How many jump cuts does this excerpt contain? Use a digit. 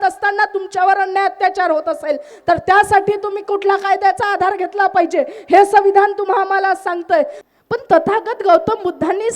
1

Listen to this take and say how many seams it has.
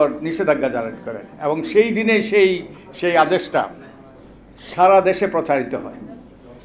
0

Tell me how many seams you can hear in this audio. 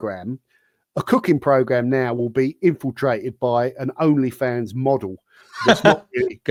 0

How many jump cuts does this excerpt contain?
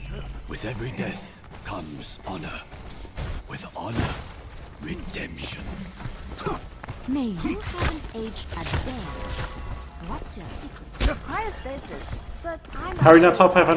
1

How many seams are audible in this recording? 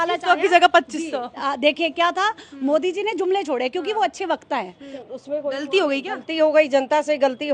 1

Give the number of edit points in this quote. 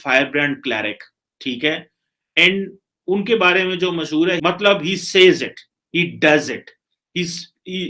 1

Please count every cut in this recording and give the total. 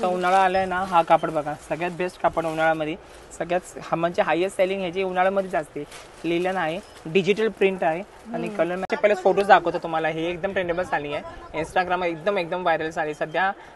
1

